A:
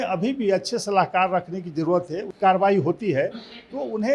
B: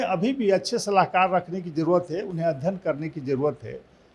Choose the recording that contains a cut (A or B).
A